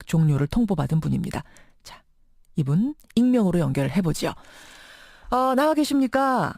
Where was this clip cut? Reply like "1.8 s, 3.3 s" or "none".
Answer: 0.9 s